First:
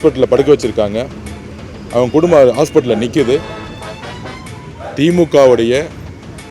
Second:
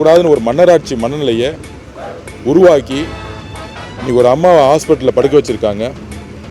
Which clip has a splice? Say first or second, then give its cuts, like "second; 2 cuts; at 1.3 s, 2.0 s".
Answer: first; 1 cut; at 3.8 s